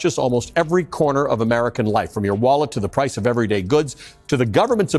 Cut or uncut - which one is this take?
uncut